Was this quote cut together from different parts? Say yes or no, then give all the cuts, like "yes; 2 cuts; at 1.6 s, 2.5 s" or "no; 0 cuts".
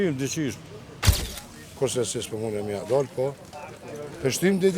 yes; 1 cut; at 1.0 s